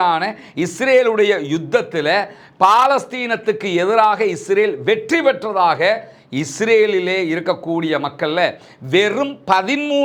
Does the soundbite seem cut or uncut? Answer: uncut